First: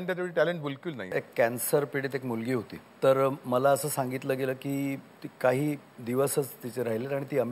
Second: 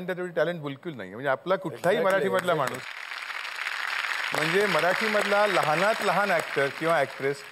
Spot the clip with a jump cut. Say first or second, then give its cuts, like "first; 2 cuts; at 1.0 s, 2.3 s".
first; 2 cuts; at 1.2 s, 2.8 s